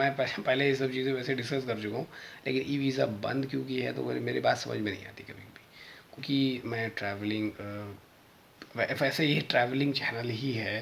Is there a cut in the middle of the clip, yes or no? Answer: yes